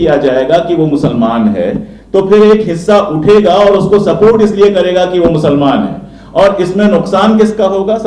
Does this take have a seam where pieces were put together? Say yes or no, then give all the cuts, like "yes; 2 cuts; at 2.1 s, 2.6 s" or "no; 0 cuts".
no; 0 cuts